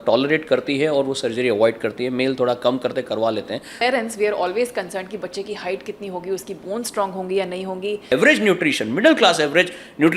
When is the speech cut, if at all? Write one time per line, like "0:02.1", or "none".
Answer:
0:03.7
0:08.1